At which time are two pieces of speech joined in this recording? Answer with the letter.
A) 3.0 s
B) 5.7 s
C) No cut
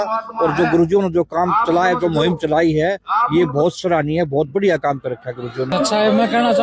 B